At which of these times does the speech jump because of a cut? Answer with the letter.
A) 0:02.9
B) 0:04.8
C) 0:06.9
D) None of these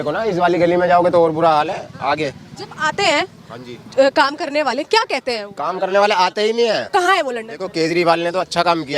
C